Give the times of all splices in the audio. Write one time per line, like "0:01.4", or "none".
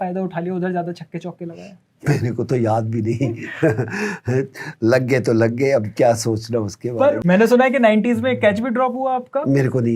0:07.2